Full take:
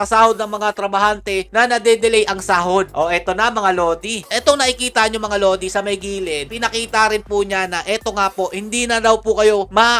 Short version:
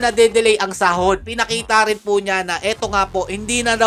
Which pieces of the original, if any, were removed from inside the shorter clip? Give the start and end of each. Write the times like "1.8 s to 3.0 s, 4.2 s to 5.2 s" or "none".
2.9 s to 6.5 s